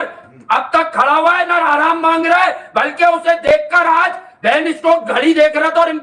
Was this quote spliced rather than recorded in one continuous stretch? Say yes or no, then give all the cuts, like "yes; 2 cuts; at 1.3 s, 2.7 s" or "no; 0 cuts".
no; 0 cuts